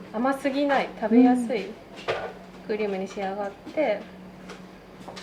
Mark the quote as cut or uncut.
uncut